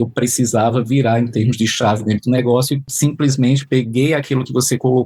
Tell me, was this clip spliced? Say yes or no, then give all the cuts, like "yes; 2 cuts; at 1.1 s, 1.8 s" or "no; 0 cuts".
yes; 1 cut; at 2.8 s